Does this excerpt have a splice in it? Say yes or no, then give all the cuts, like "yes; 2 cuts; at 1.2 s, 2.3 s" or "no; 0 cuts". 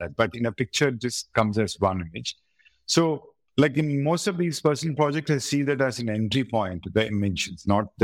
no; 0 cuts